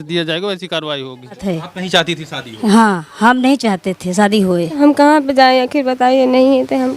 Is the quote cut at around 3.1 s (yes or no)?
no